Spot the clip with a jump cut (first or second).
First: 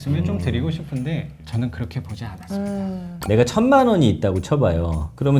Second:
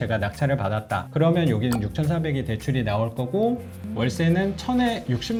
first